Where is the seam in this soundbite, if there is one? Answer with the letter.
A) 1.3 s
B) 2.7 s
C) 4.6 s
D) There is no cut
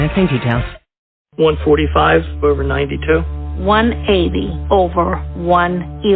A